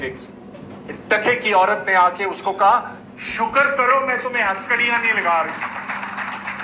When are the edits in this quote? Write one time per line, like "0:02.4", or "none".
none